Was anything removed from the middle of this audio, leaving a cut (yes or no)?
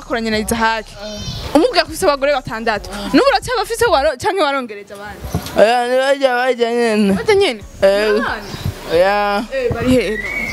no